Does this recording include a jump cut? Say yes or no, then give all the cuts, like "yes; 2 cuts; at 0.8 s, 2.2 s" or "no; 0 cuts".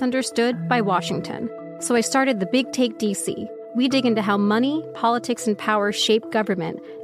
yes; 2 cuts; at 1.7 s, 3.5 s